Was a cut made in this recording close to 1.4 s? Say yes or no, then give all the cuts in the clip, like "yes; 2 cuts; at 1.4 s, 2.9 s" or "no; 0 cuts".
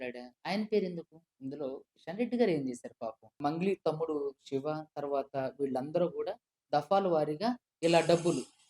no; 1 cut; at 3.4 s